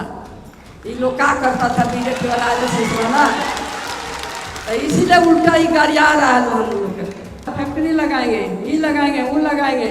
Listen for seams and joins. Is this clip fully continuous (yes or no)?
no